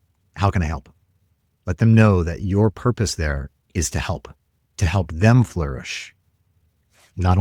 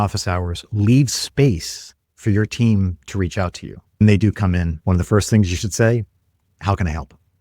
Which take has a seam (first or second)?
second